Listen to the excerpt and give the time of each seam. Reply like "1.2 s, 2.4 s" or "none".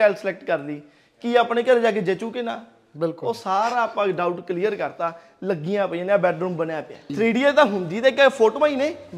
7.1 s